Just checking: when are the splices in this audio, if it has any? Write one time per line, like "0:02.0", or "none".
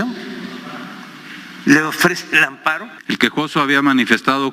0:02.9

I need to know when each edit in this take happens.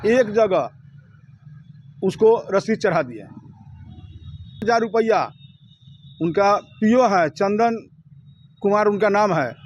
0:04.6

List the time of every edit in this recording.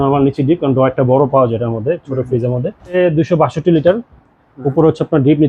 0:03.0

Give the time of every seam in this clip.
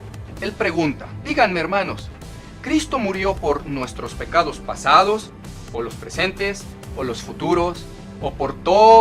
0:01.1

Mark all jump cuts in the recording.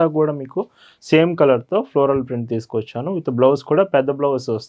none

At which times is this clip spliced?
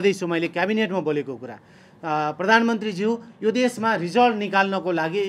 none

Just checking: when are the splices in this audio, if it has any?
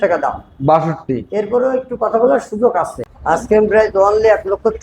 0:03.1

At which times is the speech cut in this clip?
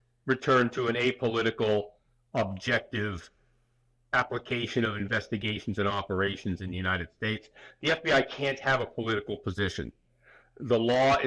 none

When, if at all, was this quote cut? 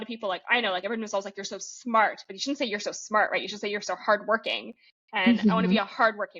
none

